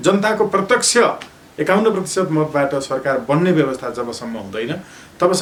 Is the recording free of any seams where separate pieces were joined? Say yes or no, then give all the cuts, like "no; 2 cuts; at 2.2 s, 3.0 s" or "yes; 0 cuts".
yes; 0 cuts